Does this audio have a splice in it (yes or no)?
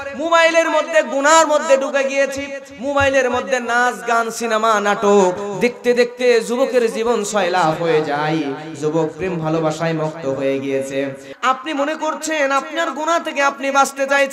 yes